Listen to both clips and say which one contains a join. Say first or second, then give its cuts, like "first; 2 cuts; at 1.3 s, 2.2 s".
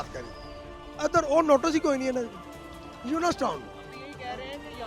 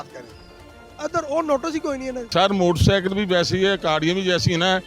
second; 1 cut; at 2.2 s